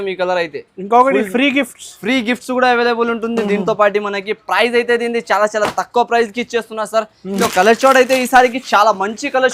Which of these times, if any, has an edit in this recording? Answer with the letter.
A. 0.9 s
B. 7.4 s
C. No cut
B